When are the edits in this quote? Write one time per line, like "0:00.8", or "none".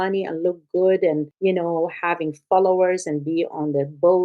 0:01.3